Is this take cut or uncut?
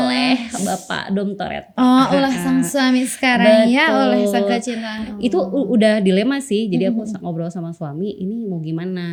uncut